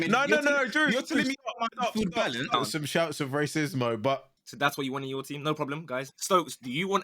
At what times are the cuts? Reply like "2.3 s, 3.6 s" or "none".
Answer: 2.5 s, 4.4 s, 6.1 s

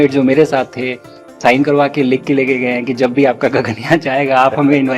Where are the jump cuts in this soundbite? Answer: 1.4 s

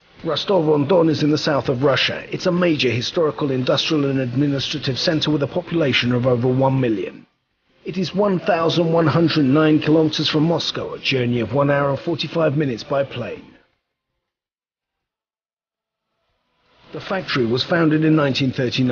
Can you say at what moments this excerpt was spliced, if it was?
1.8 s

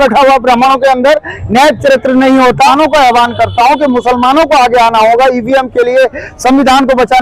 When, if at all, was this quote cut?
2.7 s

